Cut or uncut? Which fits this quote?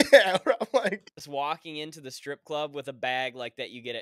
cut